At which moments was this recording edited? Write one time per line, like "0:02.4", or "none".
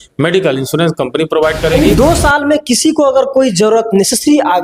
0:01.7

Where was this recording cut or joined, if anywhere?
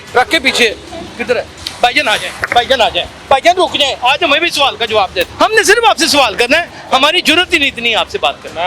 0:01.6
0:05.3

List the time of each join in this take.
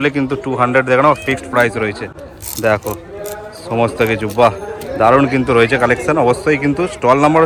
none

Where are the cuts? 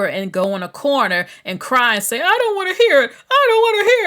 none

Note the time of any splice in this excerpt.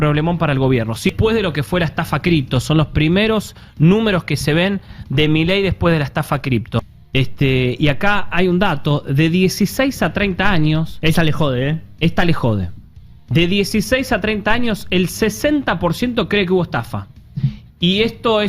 0:01.1
0:07.0

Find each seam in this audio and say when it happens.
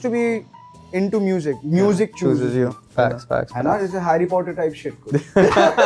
none

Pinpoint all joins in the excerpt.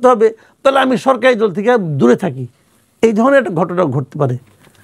none

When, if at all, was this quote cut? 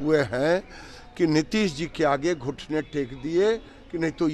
none

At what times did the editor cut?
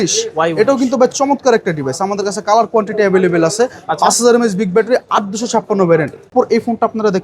0:06.3

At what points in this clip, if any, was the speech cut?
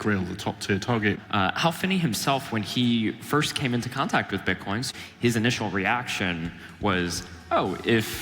0:01.2
0:04.9

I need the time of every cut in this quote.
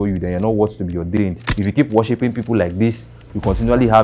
0:01.2

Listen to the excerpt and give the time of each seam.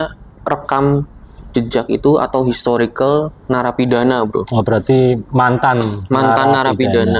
none

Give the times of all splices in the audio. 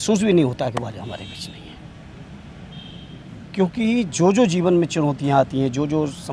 none

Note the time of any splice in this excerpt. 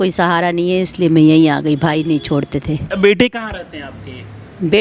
0:02.9

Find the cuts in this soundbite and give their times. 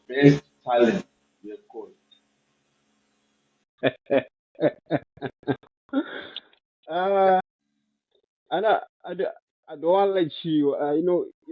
0:07.4

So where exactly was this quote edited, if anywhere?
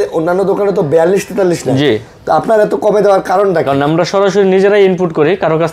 none

